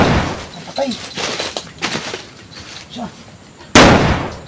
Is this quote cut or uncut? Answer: cut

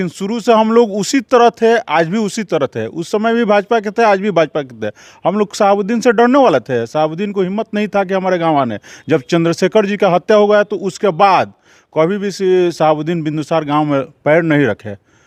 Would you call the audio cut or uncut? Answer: uncut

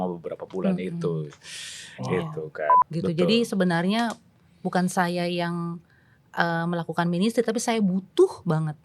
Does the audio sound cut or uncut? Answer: cut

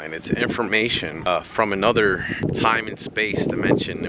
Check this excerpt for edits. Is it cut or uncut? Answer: cut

